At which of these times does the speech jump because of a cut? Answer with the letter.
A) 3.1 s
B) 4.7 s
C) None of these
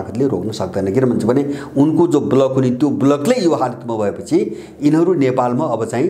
C